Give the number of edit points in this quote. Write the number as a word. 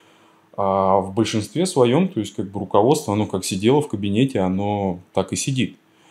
zero